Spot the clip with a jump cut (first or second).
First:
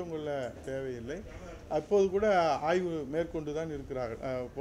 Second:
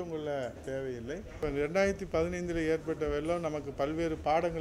second